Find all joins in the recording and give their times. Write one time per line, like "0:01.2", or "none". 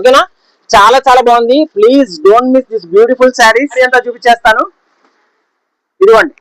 0:03.8